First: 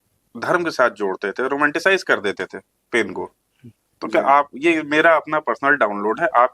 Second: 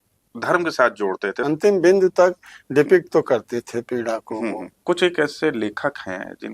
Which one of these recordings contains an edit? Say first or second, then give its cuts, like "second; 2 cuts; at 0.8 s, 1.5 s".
second; 2 cuts; at 1.3 s, 4.7 s